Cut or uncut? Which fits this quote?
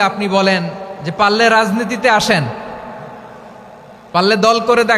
uncut